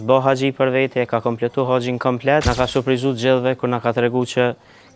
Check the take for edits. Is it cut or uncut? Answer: cut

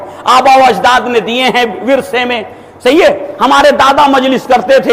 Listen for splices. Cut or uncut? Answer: uncut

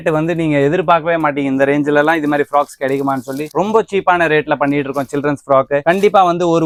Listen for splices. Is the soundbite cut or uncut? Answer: uncut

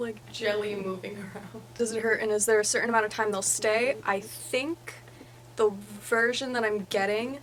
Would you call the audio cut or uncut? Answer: uncut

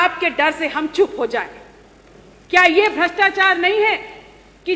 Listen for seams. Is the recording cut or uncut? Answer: uncut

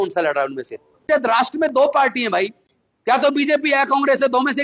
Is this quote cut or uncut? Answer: cut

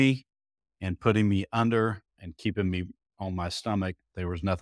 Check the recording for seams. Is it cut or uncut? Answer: cut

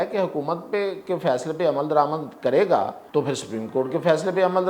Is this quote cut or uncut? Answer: cut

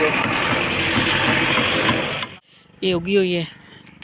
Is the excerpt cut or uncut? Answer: cut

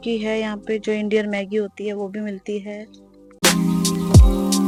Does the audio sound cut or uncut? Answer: uncut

